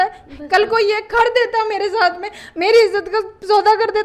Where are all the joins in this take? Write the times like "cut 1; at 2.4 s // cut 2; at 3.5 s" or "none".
none